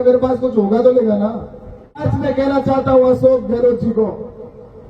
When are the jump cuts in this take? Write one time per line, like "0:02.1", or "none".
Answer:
0:02.1